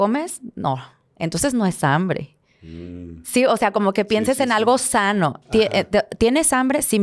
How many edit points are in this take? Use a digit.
0